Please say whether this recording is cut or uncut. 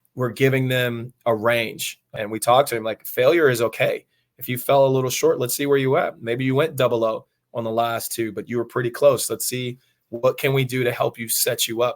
cut